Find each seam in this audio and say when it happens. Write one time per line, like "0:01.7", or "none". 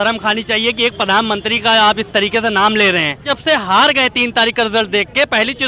0:03.3

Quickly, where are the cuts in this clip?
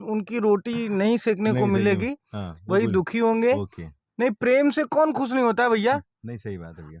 none

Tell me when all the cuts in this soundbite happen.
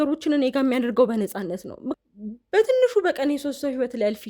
0:01.9

